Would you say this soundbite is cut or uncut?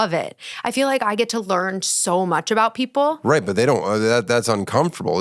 uncut